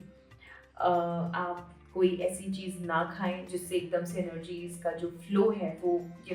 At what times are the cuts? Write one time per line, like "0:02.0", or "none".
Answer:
none